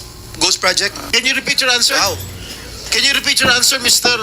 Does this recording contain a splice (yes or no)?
yes